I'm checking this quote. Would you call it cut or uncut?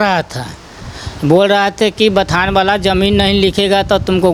uncut